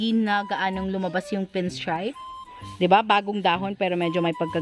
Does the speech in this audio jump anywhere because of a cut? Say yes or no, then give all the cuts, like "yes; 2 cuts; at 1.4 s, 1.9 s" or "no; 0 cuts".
yes; 1 cut; at 2.0 s